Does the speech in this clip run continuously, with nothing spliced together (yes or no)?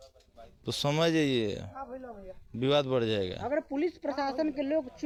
yes